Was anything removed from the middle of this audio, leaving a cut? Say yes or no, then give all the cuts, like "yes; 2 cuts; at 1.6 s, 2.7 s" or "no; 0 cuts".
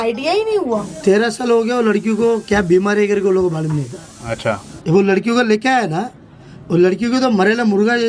yes; 2 cuts; at 0.9 s, 4.7 s